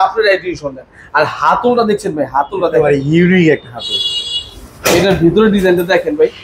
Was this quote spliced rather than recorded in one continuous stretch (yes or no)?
no